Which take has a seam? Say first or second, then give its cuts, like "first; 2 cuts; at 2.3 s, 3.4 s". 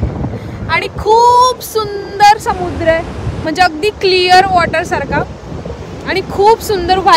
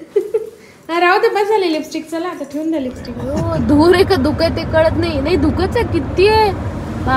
second; 1 cut; at 3.2 s